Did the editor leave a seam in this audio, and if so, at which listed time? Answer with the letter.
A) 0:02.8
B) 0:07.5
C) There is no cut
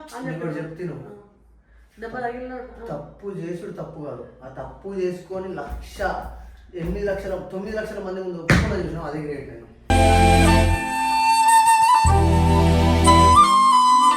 C